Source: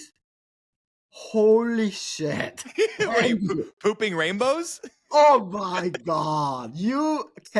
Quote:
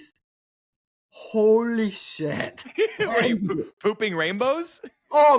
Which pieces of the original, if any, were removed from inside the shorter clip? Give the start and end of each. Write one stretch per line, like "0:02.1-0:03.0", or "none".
none